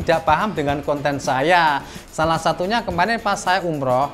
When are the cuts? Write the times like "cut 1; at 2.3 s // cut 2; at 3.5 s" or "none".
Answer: cut 1; at 2.0 s